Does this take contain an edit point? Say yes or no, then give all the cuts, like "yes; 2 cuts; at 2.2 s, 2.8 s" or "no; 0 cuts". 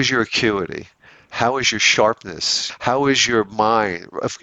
yes; 1 cut; at 2.7 s